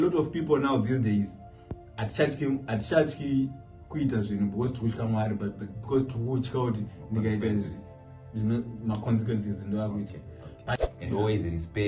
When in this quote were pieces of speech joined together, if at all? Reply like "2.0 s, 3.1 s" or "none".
10.8 s